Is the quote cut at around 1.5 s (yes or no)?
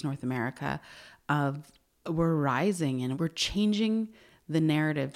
no